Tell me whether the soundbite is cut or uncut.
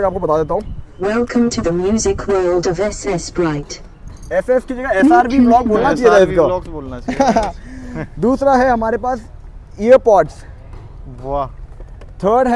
uncut